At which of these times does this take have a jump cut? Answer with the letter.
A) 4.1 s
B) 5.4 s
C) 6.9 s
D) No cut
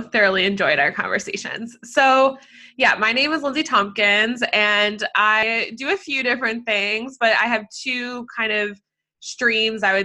B